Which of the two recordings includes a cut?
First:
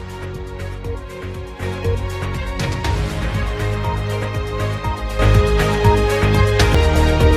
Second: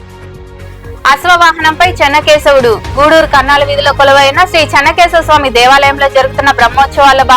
second; 1 cut; at 1.0 s

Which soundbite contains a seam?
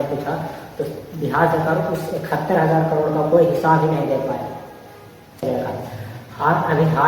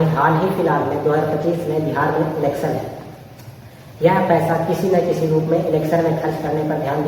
first; 1 cut; at 5.4 s

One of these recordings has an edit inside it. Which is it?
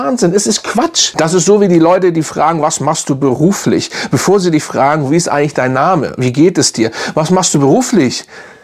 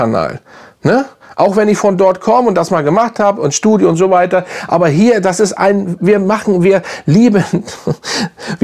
first; 1 cut; at 1.0 s

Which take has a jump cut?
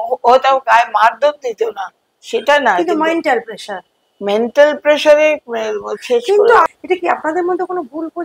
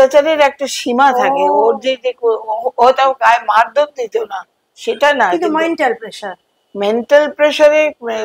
first; 1 cut; at 6.6 s

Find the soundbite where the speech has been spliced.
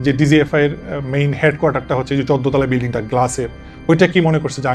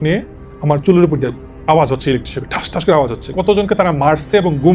second; 1 cut; at 3.3 s

